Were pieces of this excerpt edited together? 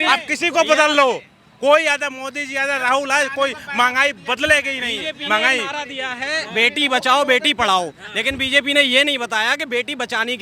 no; 0 cuts

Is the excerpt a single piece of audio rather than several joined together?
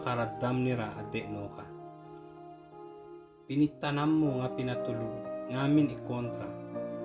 yes; 0 cuts

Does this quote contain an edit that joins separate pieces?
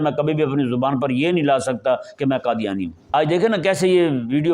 yes; 1 cut; at 3.0 s

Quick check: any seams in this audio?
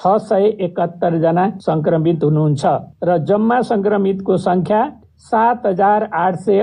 no; 0 cuts

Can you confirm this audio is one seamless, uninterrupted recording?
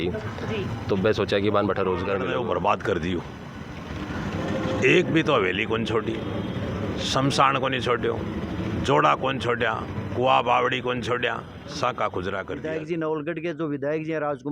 no; 2 cuts; at 2.3 s, 12.6 s

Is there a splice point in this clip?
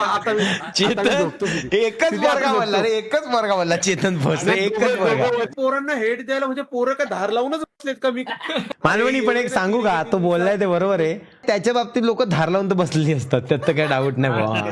yes; 2 cuts; at 5.5 s, 8.7 s

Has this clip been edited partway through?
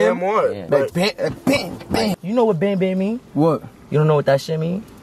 yes; 1 cut; at 2.2 s

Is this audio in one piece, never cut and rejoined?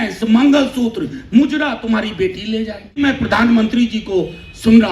no; 1 cut; at 3.0 s

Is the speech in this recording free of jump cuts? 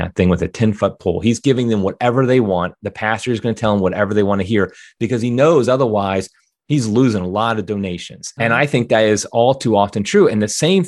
yes; 0 cuts

